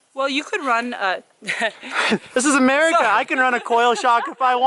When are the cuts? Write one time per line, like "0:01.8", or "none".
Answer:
none